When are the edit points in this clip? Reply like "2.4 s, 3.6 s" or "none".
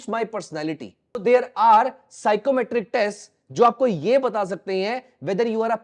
1.2 s